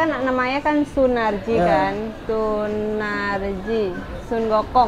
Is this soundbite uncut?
no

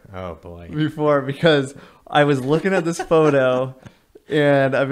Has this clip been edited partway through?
no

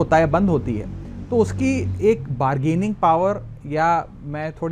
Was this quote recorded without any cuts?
yes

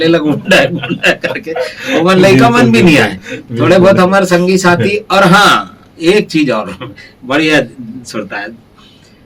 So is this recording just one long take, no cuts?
yes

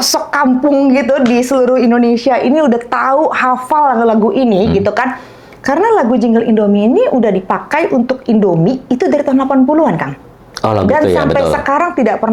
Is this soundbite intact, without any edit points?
yes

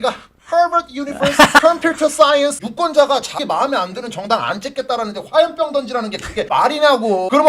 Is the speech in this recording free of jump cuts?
no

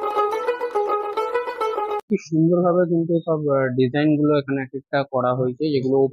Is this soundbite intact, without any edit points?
no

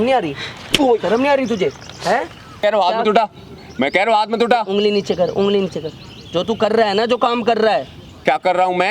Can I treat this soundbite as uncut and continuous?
no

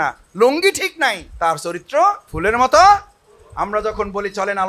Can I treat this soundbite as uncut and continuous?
no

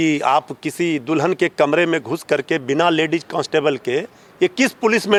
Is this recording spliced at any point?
no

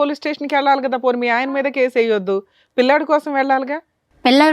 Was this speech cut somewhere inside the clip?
no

